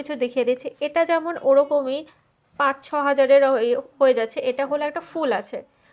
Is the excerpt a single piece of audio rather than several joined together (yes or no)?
yes